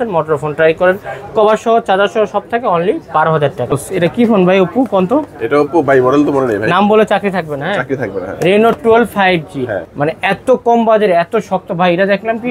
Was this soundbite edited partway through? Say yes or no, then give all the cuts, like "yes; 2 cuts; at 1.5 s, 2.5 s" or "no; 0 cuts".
yes; 2 cuts; at 3.7 s, 9.8 s